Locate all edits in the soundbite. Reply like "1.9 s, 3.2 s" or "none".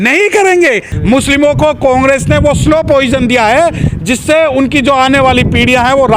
0.9 s